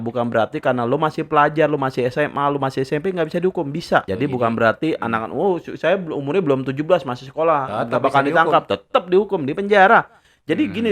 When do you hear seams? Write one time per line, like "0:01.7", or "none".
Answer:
0:04.1